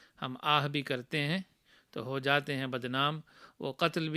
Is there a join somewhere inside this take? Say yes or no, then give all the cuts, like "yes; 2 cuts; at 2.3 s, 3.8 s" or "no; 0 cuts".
no; 0 cuts